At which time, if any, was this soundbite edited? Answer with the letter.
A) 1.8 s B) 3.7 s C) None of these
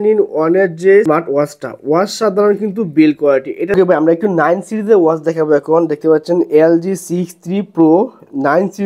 B